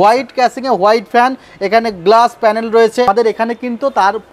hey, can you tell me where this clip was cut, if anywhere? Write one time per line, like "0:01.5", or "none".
0:03.1